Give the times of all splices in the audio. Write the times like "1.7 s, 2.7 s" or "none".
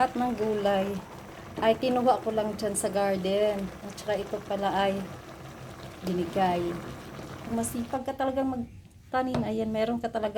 7.5 s